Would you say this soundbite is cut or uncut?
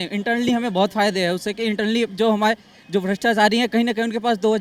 uncut